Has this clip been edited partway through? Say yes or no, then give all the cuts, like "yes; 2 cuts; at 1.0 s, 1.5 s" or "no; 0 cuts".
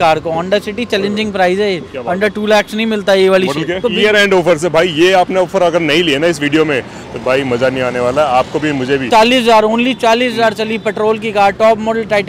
yes; 2 cuts; at 3.8 s, 9.1 s